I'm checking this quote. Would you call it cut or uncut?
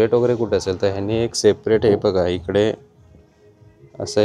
uncut